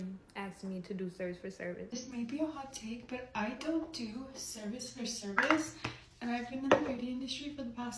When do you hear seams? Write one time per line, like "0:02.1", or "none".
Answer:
0:01.9